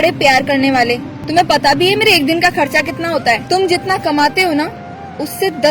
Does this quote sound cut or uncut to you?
cut